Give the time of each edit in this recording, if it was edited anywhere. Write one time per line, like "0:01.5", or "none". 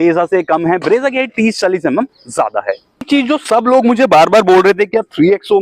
0:03.1